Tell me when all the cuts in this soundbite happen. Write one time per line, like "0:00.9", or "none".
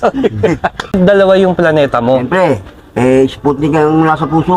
0:01.0